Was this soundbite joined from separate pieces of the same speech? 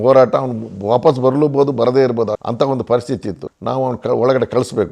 yes; 1 cut; at 2.4 s

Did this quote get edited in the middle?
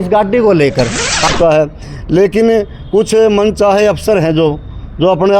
yes; 1 cut; at 1.1 s

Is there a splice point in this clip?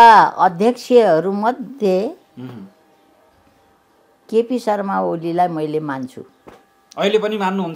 no; 0 cuts

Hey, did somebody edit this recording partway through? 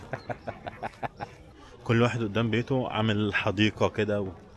no; 0 cuts

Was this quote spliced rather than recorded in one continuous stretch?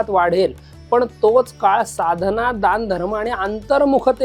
no; 0 cuts

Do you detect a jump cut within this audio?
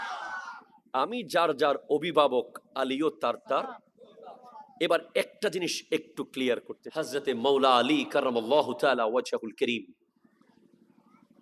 yes; 1 cut; at 7.1 s

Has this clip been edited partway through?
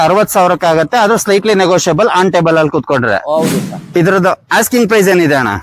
yes; 1 cut; at 3.8 s

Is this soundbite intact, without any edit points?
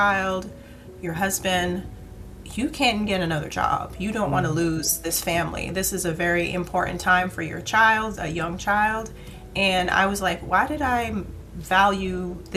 yes; 0 cuts

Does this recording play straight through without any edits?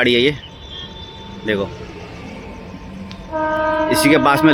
yes; 0 cuts

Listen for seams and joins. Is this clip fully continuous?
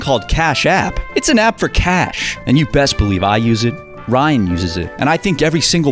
yes; 0 cuts

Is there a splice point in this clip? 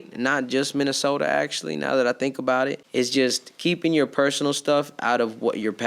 yes; 1 cut; at 2.8 s

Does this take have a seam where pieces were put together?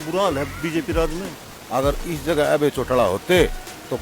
yes; 1 cut; at 1.5 s

